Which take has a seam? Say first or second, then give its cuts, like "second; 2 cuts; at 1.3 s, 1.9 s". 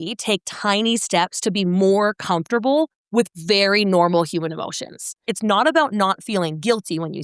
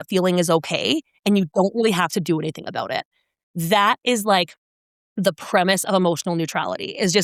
first; 1 cut; at 5.2 s